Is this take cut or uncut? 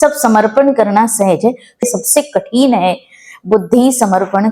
cut